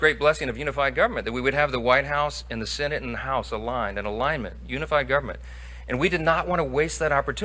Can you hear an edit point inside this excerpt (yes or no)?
no